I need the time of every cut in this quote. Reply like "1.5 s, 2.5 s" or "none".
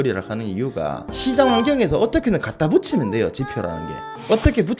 1.1 s